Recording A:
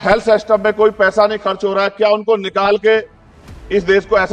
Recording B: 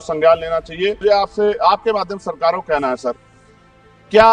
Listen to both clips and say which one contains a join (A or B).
B